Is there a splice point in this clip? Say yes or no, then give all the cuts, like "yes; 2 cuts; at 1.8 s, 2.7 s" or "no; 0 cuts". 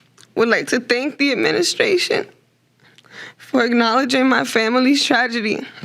no; 0 cuts